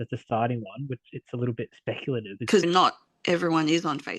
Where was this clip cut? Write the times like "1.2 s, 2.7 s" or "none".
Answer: 2.3 s

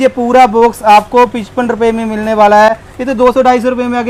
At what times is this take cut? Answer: none

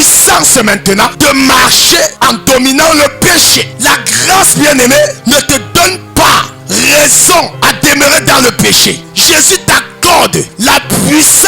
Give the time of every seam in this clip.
1.1 s, 2.1 s, 3.6 s, 5.2 s, 6.6 s, 7.5 s, 9.1 s, 10.5 s

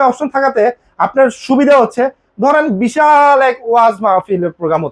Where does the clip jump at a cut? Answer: none

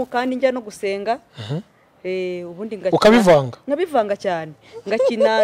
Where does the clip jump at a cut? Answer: none

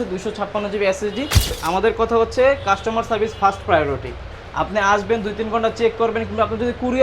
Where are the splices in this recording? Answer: 1.6 s

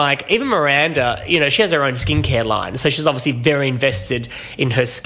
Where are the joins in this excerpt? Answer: none

